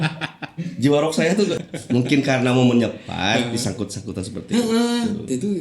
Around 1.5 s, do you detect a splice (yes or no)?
yes